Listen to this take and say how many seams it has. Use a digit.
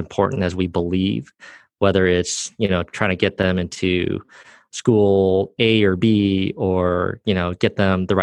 0